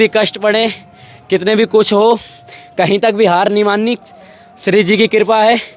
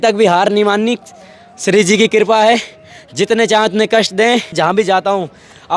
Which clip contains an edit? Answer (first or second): second